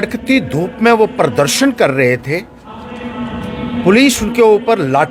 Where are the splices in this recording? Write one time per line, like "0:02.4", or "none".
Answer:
none